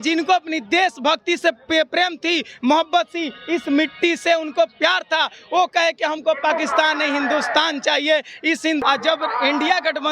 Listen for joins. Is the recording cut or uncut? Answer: cut